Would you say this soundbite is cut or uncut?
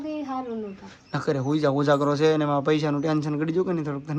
uncut